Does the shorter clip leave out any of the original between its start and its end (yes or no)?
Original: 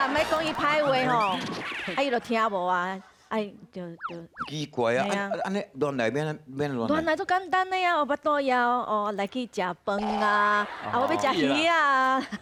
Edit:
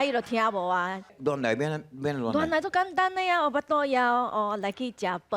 yes